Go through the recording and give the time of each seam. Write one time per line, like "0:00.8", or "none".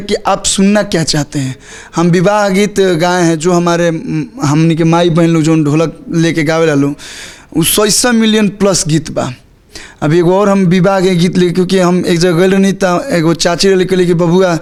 none